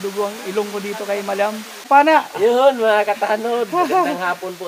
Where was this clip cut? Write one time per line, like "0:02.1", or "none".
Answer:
0:01.9